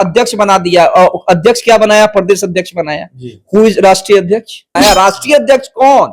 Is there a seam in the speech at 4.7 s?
yes; 1 cut; at 4.7 s

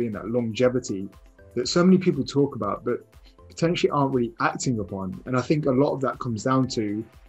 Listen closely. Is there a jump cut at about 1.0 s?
no; 0 cuts

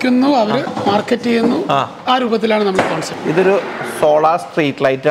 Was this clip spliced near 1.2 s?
no; 1 cut; at 3.1 s

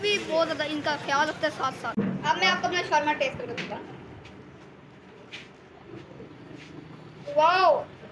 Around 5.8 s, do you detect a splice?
no; 1 cut; at 2.0 s

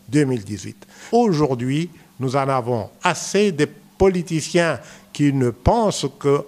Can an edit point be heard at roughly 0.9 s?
yes; 1 cut; at 0.9 s

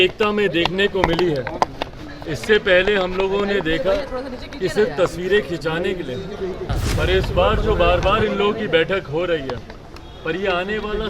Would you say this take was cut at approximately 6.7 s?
yes; 1 cut; at 6.7 s

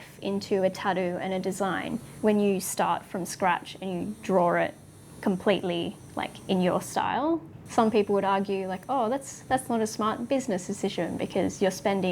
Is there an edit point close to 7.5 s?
yes; 2 cuts; at 2.1 s, 7.5 s

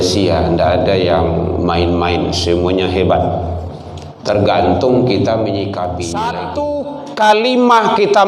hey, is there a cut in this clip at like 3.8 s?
no; 1 cut; at 6.4 s

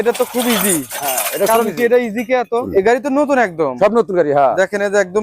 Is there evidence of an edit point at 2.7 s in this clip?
yes; 1 cut; at 2.7 s

